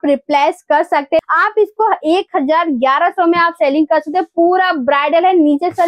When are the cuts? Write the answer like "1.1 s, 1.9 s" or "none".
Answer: 1.2 s